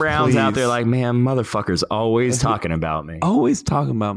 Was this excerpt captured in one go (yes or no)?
no